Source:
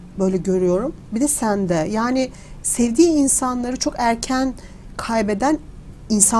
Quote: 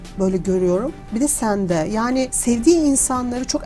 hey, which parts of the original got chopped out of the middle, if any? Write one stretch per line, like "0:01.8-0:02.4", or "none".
0:02.3-0:02.7